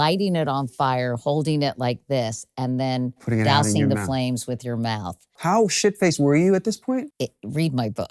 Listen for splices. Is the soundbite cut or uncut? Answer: cut